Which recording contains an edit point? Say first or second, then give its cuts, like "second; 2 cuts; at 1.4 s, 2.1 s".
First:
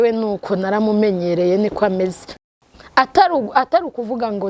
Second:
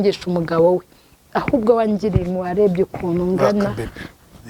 first; 1 cut; at 2.3 s